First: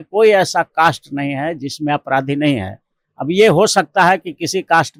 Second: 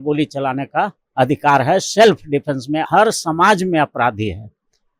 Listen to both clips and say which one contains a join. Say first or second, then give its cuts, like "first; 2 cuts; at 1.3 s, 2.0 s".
second; 1 cut; at 2.8 s